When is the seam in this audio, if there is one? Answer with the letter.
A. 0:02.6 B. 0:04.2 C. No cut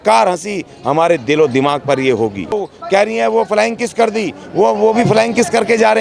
A